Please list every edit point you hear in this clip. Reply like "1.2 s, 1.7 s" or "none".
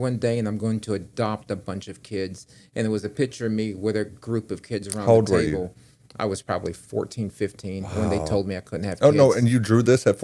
none